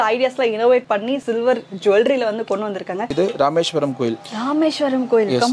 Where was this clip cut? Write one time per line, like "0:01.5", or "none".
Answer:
0:03.1